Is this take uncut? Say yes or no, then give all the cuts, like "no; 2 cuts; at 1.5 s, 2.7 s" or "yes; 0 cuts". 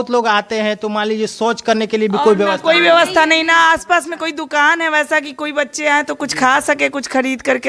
yes; 0 cuts